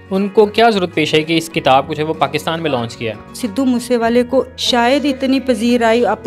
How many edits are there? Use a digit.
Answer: 2